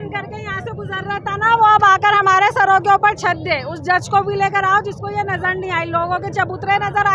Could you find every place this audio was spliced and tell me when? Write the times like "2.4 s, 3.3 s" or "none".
none